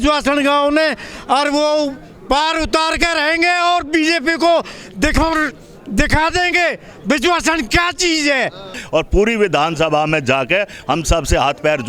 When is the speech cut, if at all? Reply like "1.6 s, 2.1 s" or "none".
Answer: 8.8 s